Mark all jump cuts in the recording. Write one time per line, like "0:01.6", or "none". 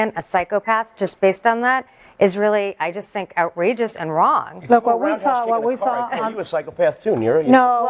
none